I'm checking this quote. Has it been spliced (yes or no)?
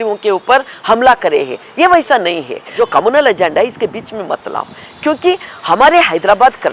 yes